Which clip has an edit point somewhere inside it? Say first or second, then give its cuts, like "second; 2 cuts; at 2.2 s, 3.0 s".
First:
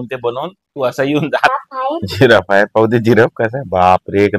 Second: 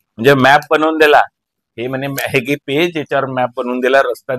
first; 1 cut; at 1.5 s